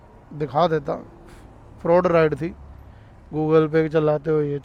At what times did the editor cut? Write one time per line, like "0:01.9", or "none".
none